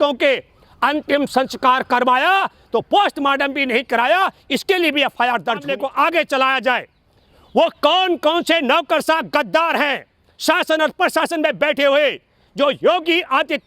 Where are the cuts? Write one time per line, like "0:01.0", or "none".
0:05.7

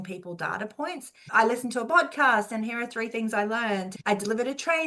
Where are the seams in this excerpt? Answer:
0:01.1
0:03.9

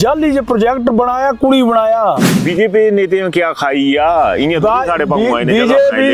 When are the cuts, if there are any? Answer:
0:02.3

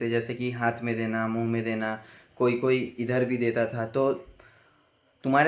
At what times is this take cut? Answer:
none

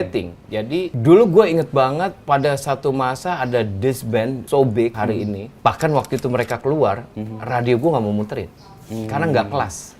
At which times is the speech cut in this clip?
0:00.9
0:02.2
0:04.4
0:05.0

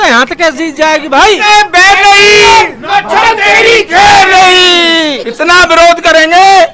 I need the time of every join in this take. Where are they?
0:01.4
0:05.2

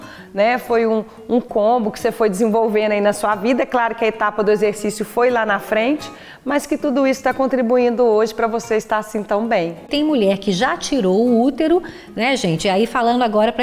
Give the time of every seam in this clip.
0:09.9

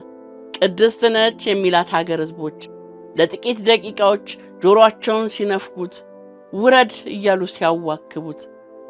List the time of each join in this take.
none

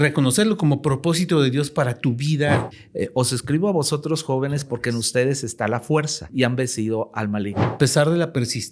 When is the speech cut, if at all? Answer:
0:02.7
0:06.2
0:07.8

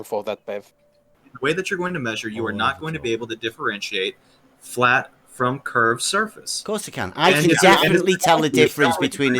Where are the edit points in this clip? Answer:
0:01.3

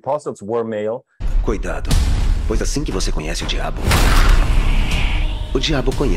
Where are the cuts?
0:01.2

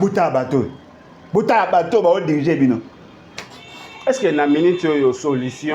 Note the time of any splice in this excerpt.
none

